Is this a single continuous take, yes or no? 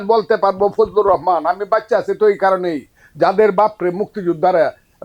yes